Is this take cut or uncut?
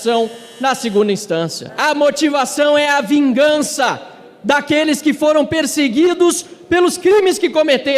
cut